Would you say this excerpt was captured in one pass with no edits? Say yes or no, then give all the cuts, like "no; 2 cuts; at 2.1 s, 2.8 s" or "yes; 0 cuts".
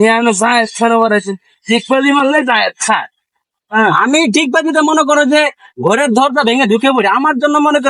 yes; 0 cuts